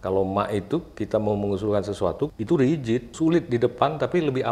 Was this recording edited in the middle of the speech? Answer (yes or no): yes